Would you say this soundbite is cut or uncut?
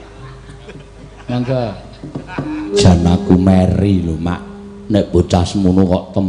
cut